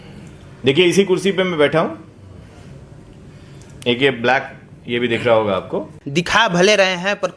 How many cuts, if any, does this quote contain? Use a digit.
1